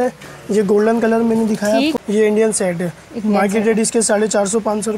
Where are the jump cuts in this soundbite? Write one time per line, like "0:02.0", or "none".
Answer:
0:02.0